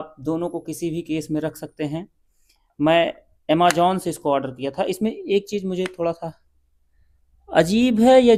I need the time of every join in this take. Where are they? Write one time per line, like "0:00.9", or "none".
none